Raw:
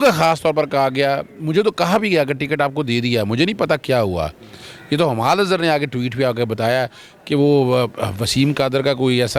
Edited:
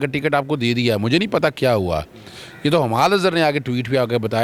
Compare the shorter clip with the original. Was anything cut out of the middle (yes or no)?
no